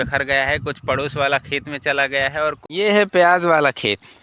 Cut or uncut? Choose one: cut